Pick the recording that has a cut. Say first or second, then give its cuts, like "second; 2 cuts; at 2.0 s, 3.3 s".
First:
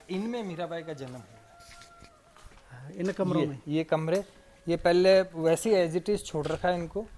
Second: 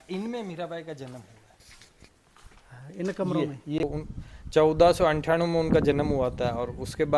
second; 1 cut; at 3.8 s